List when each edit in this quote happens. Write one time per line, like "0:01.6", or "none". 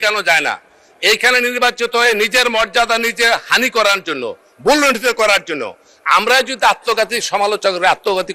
none